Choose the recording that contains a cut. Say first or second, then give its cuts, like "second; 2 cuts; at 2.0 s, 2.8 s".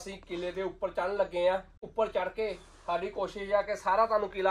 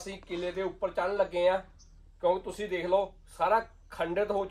first; 1 cut; at 1.8 s